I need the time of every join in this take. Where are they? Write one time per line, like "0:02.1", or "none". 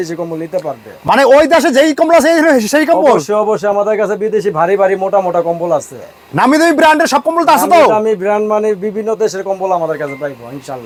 none